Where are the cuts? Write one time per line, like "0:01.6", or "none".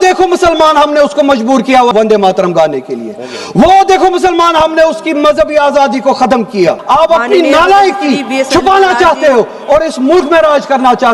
0:01.9
0:06.8